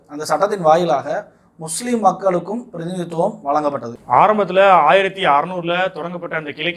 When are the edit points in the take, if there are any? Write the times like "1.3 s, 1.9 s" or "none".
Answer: 3.9 s